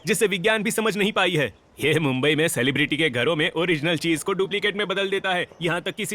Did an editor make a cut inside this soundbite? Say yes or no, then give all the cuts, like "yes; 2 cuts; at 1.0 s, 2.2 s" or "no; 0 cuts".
no; 0 cuts